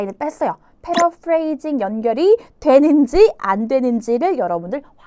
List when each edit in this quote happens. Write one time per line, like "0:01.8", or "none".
none